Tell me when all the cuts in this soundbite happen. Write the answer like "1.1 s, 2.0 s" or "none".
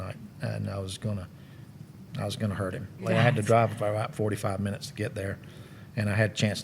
3.1 s

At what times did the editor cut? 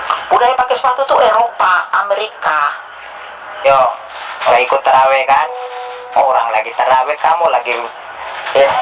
3.6 s

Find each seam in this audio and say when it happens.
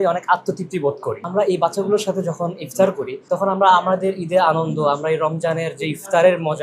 1.2 s

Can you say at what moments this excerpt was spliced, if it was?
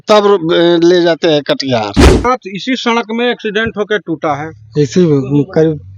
2.2 s

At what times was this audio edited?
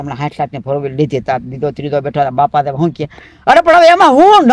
none

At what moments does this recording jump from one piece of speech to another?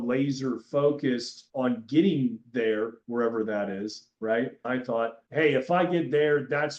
1.4 s, 4.6 s

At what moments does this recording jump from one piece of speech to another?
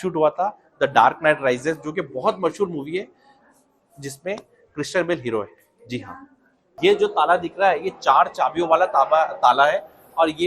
6.7 s

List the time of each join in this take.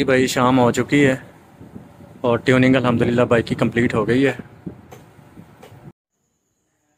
6.0 s

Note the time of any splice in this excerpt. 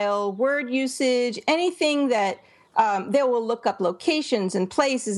none

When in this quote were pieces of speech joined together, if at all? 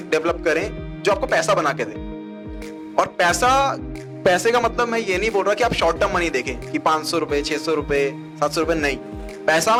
none

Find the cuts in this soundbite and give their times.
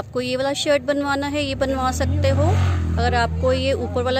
none

